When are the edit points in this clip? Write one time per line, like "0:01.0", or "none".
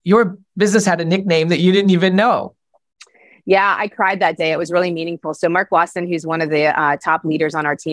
none